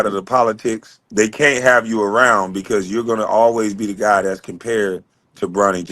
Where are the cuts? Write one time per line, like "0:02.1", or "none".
0:00.9